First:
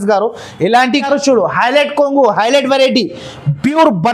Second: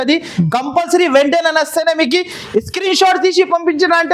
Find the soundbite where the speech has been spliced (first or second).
first